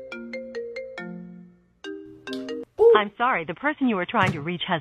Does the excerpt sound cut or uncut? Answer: uncut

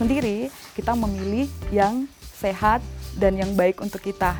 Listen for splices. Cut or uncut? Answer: uncut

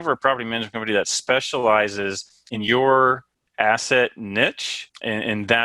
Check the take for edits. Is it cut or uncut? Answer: cut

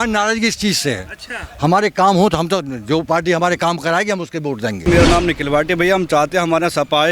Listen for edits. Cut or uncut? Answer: cut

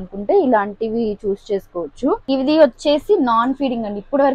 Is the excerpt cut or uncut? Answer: cut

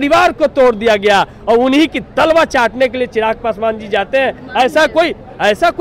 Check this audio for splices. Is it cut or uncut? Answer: uncut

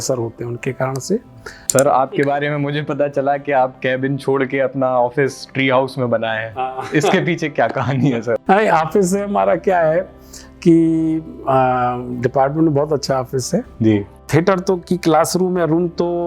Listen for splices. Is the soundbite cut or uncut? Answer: cut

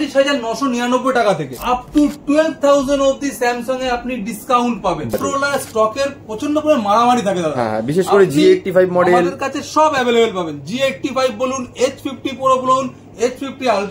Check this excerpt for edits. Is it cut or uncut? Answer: cut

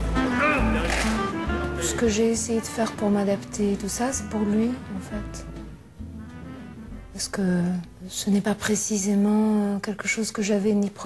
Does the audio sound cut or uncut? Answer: uncut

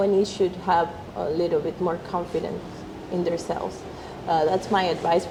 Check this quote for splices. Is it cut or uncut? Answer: uncut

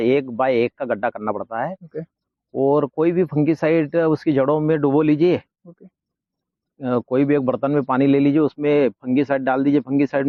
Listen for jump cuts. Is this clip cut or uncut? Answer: uncut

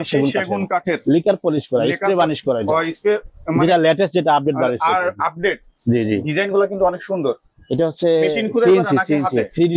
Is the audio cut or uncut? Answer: uncut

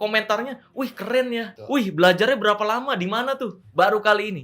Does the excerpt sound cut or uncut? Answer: cut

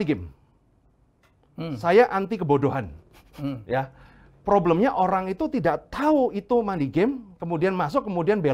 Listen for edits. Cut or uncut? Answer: uncut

